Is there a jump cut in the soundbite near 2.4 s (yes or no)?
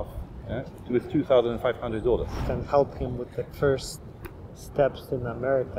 yes